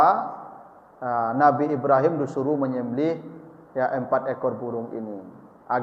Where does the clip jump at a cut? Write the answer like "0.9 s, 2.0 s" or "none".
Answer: none